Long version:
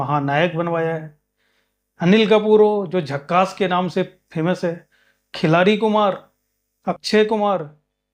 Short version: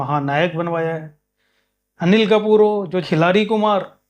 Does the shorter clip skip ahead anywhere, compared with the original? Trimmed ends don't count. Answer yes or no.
yes